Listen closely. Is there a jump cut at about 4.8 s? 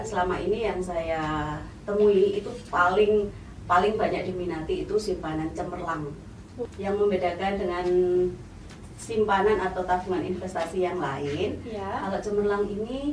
no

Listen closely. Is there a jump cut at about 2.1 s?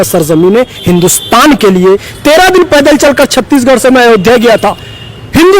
yes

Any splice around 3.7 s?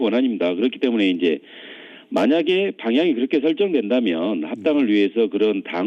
yes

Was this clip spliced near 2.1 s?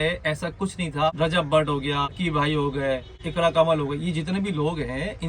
yes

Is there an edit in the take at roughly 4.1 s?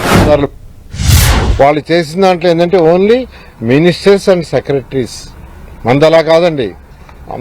no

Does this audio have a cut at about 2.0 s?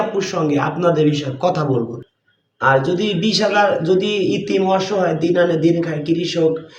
yes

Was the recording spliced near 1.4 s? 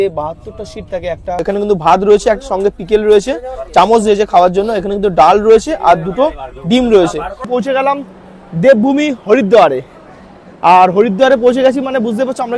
yes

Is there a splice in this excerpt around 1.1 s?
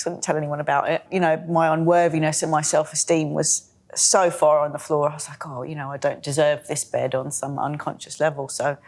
yes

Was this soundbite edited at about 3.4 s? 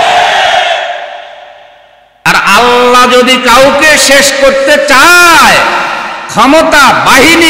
no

